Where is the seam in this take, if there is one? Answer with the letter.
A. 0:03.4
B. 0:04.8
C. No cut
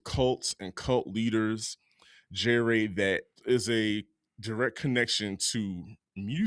A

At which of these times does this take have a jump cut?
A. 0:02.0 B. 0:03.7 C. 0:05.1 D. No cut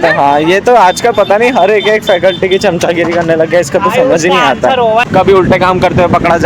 C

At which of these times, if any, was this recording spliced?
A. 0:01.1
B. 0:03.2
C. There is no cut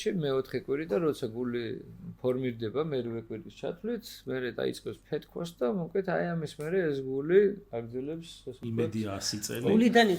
C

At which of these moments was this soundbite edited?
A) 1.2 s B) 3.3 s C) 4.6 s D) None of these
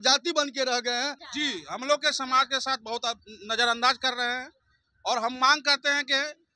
A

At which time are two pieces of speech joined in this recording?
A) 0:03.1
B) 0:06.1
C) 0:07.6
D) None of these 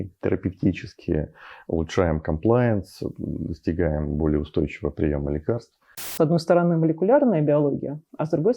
B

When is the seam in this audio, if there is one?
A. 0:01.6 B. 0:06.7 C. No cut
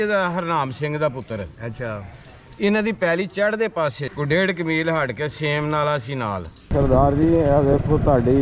B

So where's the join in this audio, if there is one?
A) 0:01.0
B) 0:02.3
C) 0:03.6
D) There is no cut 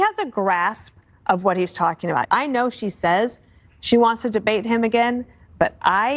B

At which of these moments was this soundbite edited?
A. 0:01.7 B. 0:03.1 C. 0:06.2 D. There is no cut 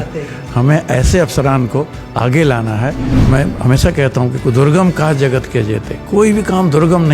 B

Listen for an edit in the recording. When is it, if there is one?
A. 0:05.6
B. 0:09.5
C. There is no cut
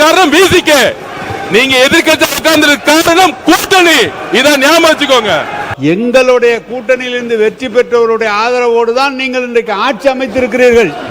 A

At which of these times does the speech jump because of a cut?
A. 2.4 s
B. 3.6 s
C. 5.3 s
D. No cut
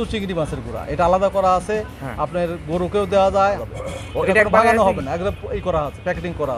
B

